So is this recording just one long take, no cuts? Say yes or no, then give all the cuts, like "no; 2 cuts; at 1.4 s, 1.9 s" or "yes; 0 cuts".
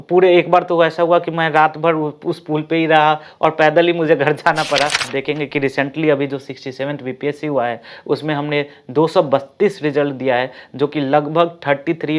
no; 1 cut; at 5.1 s